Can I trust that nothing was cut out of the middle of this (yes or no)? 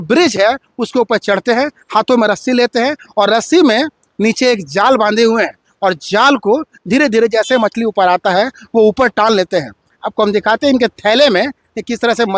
yes